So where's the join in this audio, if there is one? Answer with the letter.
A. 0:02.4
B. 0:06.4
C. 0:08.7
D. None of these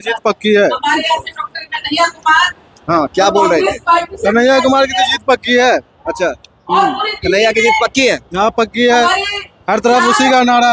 D